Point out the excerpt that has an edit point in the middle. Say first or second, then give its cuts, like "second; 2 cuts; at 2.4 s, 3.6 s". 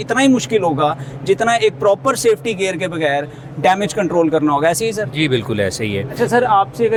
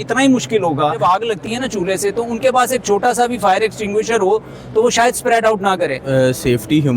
second; 2 cuts; at 1.0 s, 6.0 s